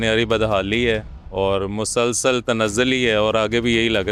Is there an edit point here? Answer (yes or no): no